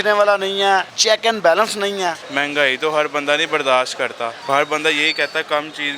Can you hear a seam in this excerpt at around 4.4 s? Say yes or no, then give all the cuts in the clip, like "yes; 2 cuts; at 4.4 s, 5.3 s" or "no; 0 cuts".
yes; 3 cuts; at 0.9 s, 2.2 s, 4.4 s